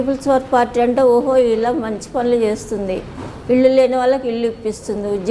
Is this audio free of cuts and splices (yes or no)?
yes